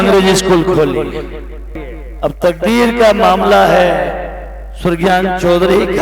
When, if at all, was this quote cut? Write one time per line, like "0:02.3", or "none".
0:01.7